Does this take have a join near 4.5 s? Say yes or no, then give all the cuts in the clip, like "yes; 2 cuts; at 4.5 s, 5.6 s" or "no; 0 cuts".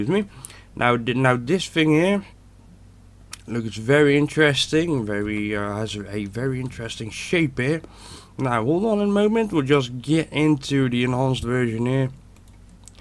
yes; 1 cut; at 4.5 s